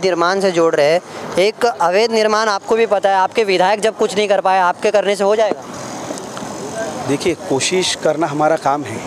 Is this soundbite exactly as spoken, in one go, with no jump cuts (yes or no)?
yes